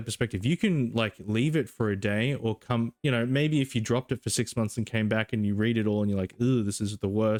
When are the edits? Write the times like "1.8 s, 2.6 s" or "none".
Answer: none